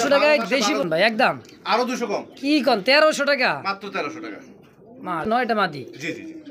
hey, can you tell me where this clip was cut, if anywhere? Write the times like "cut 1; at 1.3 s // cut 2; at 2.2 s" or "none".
cut 1; at 0.8 s // cut 2; at 5.3 s